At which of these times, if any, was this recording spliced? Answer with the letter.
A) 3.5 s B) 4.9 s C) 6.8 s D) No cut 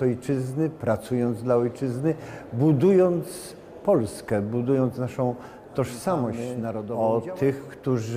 C